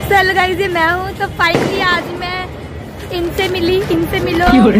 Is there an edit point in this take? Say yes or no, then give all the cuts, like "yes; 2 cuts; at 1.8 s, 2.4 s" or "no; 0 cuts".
no; 0 cuts